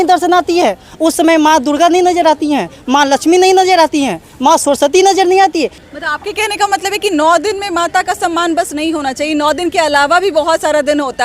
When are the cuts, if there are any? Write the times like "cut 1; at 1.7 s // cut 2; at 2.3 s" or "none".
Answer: none